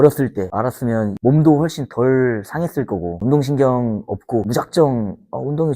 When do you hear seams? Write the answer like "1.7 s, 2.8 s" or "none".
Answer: 1.1 s, 3.2 s